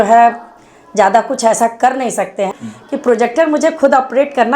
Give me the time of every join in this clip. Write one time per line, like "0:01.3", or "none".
0:02.5